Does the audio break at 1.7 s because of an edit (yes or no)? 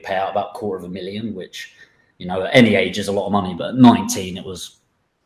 no